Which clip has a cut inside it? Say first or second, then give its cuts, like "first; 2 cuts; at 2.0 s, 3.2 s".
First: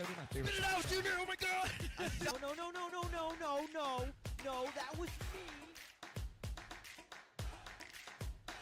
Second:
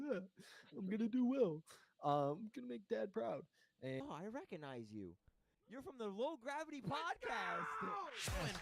second; 1 cut; at 4.0 s